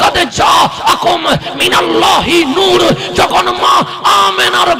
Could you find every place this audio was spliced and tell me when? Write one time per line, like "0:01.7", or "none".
none